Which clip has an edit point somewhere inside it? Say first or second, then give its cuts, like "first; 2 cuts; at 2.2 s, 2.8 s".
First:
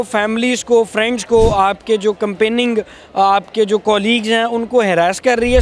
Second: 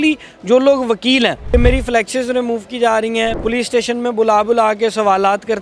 second; 2 cuts; at 1.4 s, 3.4 s